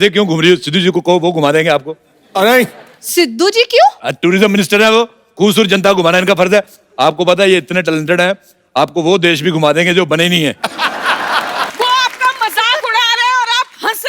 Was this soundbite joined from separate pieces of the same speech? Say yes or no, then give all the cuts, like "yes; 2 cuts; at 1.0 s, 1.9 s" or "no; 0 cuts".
yes; 1 cut; at 11.7 s